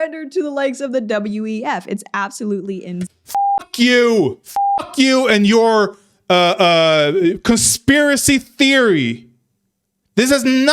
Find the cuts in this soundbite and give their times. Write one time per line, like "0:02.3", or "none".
none